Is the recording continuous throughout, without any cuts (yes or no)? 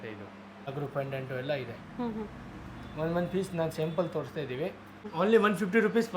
no